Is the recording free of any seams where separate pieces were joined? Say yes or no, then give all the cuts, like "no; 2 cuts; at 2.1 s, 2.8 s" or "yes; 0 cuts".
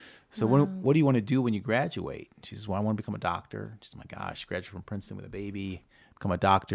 yes; 0 cuts